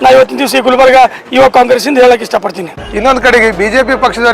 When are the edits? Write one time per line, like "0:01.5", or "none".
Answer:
0:02.8

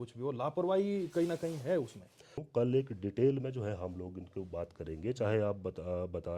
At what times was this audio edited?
0:02.4

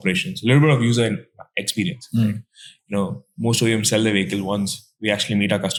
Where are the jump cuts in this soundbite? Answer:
none

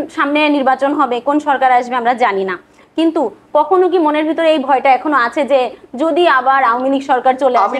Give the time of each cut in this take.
none

